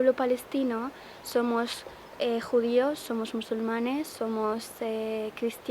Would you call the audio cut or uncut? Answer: uncut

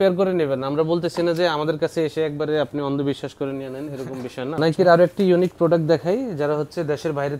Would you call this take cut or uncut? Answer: cut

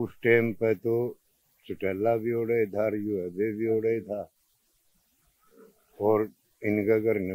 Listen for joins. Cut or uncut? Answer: uncut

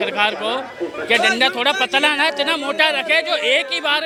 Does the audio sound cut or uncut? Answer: uncut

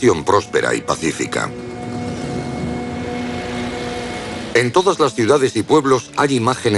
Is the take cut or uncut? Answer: cut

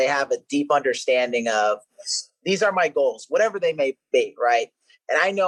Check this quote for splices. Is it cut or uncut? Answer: uncut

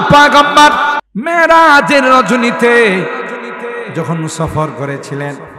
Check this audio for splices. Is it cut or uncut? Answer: cut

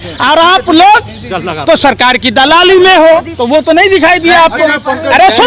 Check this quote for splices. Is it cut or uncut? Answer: cut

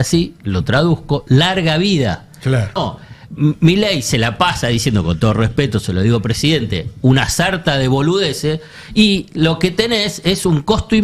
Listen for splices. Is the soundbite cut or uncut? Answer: cut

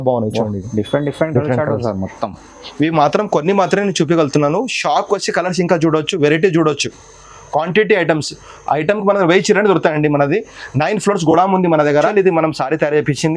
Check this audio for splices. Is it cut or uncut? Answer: cut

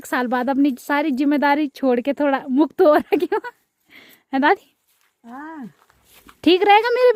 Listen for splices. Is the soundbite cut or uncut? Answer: uncut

